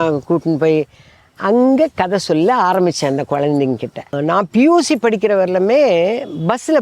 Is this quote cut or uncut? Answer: cut